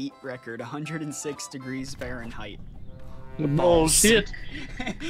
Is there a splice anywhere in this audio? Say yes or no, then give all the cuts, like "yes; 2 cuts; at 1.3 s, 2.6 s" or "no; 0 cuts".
no; 0 cuts